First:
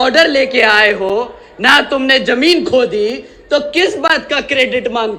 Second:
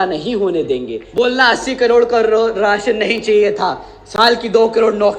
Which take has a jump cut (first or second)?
second